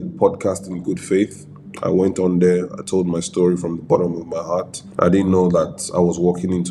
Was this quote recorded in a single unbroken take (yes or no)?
yes